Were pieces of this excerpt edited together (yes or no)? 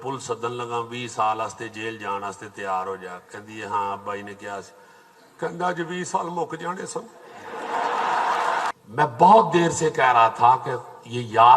yes